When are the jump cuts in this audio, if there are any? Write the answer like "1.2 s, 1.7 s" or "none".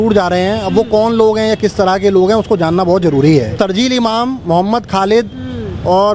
3.5 s